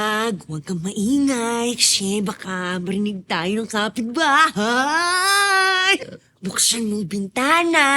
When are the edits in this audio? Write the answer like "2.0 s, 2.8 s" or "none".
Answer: 6.0 s